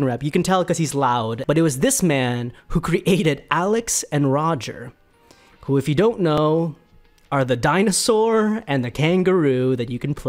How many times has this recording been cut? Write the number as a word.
one